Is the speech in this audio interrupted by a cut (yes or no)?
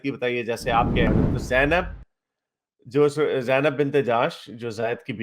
yes